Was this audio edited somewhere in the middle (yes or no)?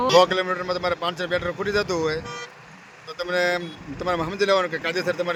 no